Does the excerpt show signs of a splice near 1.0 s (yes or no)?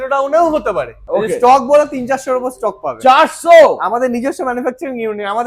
yes